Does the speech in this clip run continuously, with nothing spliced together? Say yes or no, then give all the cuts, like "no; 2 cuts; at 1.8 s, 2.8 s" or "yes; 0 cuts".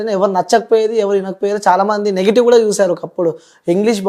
yes; 0 cuts